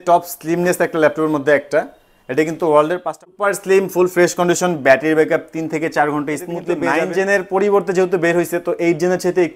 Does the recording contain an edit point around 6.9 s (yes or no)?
yes